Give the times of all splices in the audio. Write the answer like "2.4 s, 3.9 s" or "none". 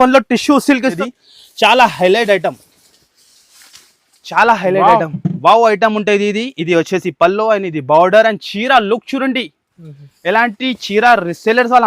0.9 s